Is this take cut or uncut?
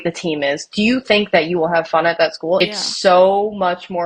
cut